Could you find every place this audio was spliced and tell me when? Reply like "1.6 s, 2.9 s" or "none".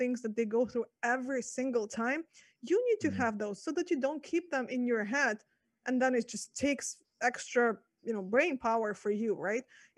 none

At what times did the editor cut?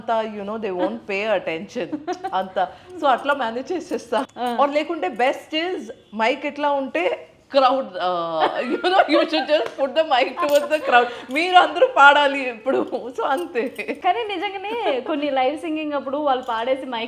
4.3 s, 13.8 s

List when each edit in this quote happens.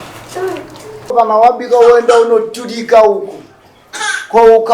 1.1 s

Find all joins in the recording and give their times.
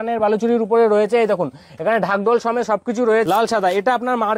3.3 s

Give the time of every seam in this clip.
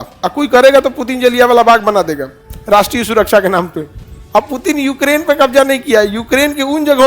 3.9 s

